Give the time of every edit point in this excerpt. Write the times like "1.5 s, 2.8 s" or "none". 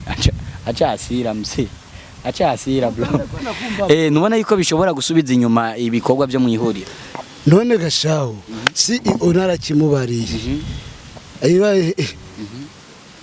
none